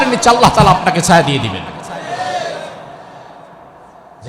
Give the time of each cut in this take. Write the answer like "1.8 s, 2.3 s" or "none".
none